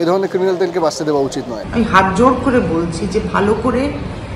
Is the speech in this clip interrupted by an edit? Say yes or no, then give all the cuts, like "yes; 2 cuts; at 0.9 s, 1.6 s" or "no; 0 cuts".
yes; 1 cut; at 1.6 s